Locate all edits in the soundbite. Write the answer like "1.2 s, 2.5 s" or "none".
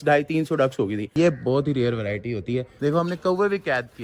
1.1 s, 2.7 s